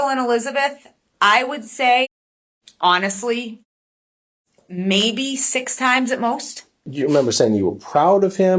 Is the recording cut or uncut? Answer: cut